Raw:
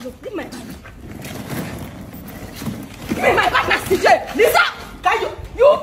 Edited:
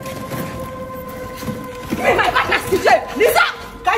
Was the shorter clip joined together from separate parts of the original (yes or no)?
no